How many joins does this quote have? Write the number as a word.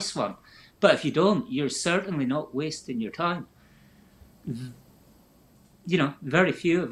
zero